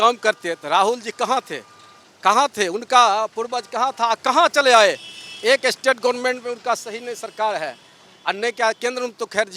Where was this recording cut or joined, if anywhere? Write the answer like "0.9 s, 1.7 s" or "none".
none